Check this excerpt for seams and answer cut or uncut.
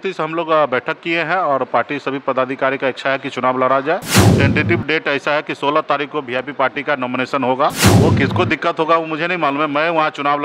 cut